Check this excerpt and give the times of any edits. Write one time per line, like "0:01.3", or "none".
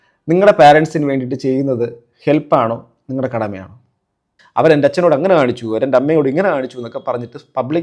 0:04.3